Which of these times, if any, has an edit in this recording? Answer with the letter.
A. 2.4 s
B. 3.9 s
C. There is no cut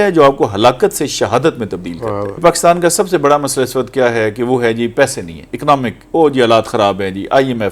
A